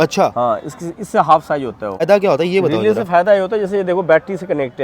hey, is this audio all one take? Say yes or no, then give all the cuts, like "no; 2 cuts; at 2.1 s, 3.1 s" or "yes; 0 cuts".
no; 1 cut; at 2.0 s